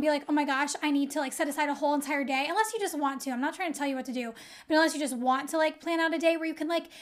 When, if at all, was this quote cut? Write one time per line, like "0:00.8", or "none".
none